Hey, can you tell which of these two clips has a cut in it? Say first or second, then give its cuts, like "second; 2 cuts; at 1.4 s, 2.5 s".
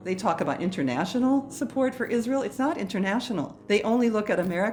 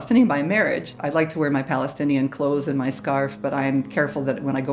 second; 1 cut; at 0.9 s